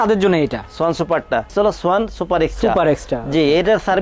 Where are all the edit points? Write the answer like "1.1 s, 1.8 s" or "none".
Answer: 1.5 s